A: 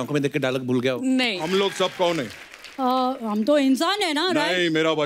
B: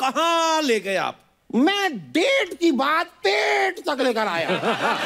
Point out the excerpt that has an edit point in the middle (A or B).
A